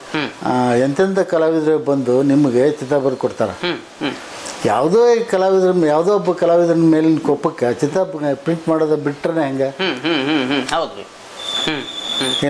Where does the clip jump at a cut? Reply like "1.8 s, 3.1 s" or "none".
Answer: none